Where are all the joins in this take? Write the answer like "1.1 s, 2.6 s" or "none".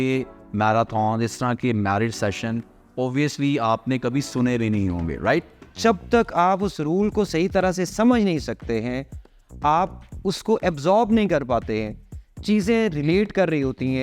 5.6 s